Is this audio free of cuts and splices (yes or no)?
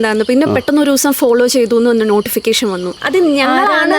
no